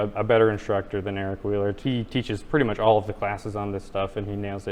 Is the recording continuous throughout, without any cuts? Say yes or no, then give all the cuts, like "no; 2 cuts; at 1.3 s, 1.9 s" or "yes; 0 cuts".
no; 1 cut; at 1.8 s